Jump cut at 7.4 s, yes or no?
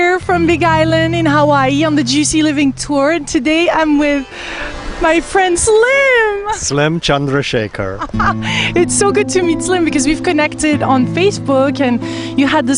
no